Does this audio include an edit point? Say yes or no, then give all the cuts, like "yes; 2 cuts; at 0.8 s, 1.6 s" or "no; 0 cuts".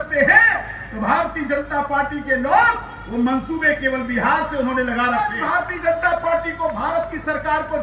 yes; 1 cut; at 5.4 s